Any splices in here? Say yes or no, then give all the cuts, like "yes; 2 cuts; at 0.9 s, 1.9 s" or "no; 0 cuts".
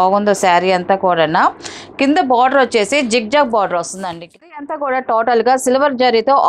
yes; 1 cut; at 4.5 s